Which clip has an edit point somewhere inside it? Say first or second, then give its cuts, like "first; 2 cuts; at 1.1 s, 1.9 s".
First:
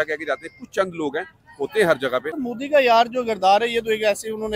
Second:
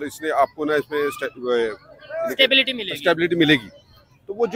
first; 1 cut; at 2.3 s